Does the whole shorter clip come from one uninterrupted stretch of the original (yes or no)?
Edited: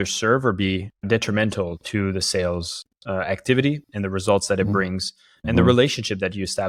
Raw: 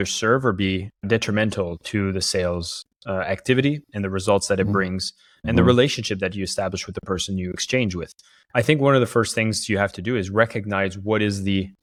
yes